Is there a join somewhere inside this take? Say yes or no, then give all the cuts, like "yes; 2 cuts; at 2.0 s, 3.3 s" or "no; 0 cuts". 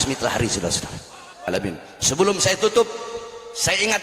yes; 1 cut; at 1.5 s